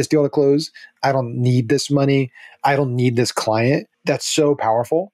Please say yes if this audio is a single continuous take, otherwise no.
no